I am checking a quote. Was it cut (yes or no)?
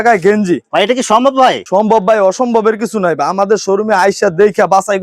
no